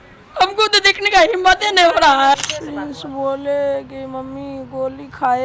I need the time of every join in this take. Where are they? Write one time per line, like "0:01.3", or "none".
0:02.3